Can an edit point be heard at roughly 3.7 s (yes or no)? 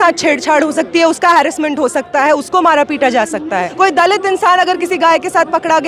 yes